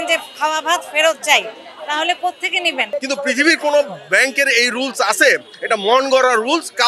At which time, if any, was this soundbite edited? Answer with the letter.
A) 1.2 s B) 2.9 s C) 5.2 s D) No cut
B